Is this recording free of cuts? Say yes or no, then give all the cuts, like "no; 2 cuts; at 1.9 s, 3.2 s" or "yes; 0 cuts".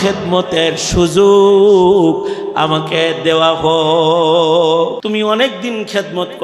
no; 1 cut; at 5.0 s